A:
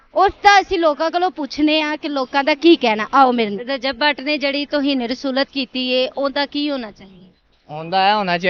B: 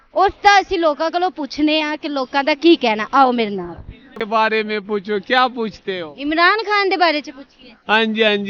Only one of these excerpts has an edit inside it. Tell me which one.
A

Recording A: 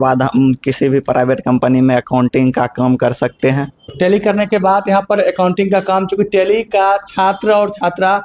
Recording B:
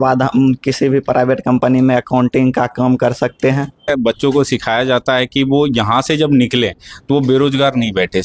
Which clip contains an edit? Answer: B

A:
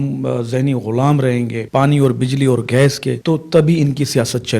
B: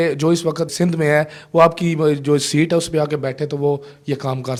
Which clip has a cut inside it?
A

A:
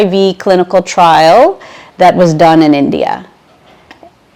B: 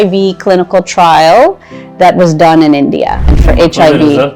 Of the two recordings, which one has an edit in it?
B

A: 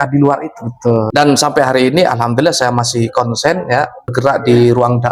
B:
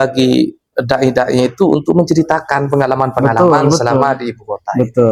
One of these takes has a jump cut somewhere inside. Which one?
A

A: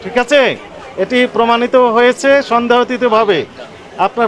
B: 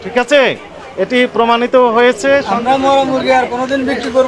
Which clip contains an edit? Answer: B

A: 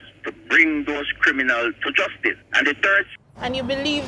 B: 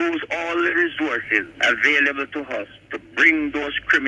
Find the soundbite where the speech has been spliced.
A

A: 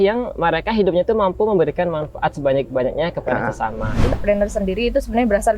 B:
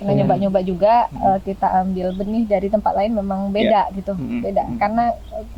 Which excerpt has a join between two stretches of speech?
A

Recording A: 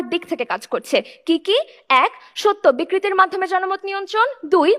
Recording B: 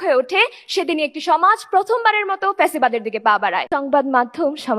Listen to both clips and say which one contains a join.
B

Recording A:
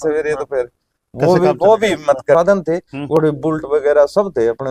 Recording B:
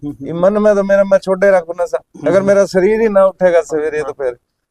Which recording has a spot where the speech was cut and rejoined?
A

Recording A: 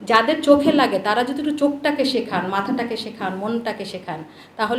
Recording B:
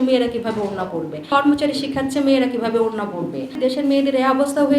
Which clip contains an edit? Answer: B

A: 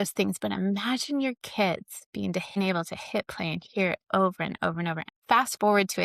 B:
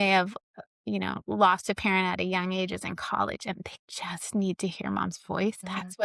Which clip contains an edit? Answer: A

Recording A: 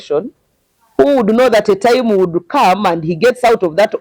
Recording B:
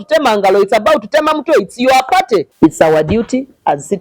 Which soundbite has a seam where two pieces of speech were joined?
B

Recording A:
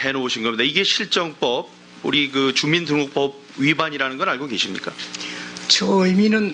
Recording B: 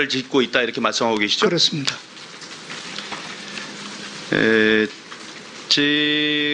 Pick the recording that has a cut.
B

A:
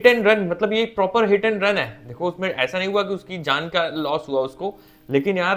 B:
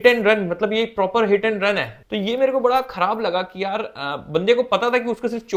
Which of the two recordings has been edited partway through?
B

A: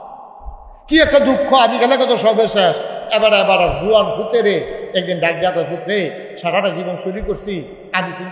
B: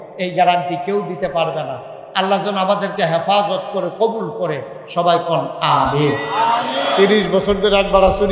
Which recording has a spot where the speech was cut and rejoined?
B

